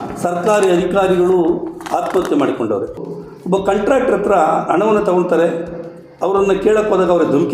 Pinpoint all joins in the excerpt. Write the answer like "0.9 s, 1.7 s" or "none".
3.0 s